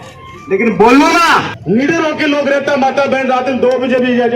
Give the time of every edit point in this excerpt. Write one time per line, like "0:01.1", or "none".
0:01.5